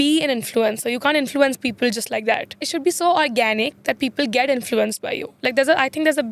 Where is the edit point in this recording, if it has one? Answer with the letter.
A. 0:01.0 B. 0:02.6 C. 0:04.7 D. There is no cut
B